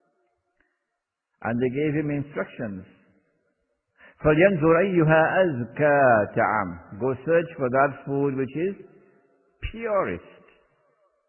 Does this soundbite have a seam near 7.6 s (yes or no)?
no